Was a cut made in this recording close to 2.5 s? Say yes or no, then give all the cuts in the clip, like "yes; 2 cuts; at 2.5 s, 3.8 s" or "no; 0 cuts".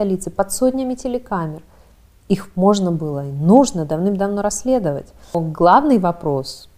no; 1 cut; at 5.4 s